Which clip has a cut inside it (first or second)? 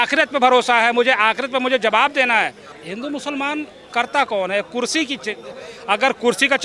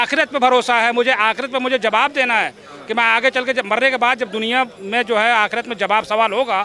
first